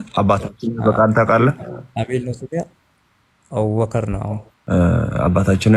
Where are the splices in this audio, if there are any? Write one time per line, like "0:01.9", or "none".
0:04.5